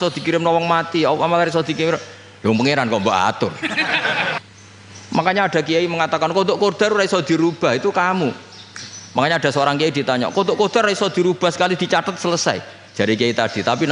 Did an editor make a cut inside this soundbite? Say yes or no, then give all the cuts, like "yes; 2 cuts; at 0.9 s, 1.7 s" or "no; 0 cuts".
yes; 1 cut; at 4.4 s